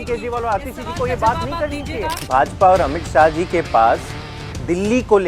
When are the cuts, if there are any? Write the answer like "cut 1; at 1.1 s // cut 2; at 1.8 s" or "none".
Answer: cut 1; at 2.3 s

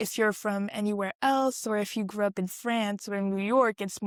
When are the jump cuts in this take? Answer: none

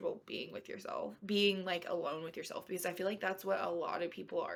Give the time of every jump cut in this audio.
none

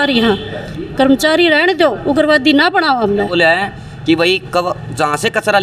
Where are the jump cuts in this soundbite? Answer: cut 1; at 3.3 s

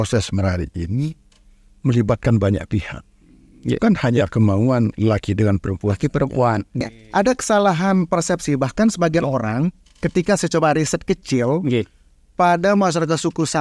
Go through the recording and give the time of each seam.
cut 1; at 6.8 s

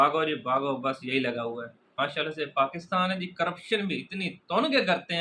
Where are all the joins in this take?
cut 1; at 2.0 s

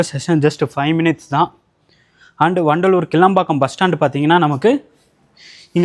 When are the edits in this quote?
none

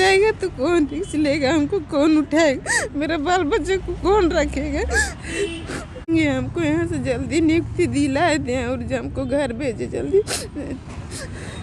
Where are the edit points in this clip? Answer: cut 1; at 6.1 s

